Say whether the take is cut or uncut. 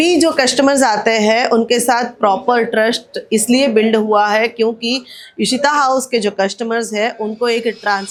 uncut